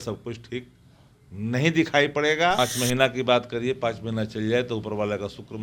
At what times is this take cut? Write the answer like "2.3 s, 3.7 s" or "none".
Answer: 2.6 s